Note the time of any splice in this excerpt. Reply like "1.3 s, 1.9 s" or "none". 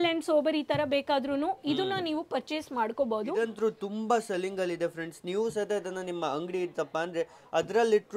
3.4 s